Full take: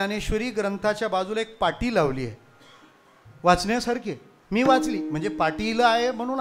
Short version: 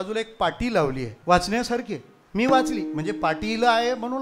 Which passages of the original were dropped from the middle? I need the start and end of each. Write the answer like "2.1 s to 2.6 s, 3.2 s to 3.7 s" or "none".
2.3 s to 3.3 s